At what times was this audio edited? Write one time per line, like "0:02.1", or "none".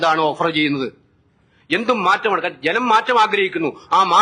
none